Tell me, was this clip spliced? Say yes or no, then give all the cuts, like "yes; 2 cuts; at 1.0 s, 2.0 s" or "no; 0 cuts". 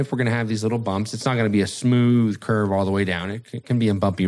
no; 0 cuts